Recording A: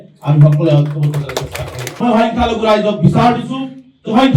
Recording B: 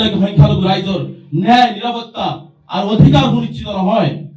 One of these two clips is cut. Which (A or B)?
A